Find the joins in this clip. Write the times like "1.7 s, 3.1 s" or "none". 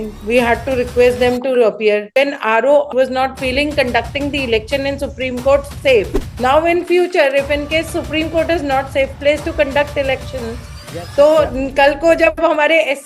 2.1 s, 2.9 s, 6.2 s